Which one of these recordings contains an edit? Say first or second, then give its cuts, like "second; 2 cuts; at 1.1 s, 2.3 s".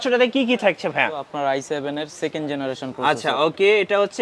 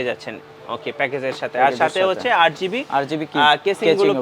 first; 1 cut; at 1.3 s